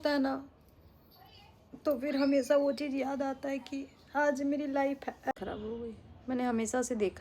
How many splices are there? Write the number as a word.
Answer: one